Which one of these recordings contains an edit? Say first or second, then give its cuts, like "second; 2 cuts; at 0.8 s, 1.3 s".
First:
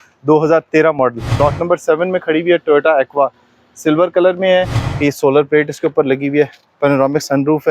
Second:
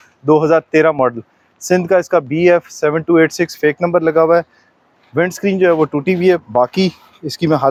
first; 2 cuts; at 1.4 s, 4.8 s